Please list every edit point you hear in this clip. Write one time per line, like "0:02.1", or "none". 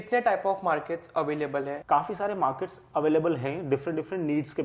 0:01.8